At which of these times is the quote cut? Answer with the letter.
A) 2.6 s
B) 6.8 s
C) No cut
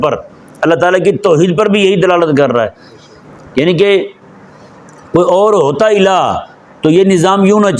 C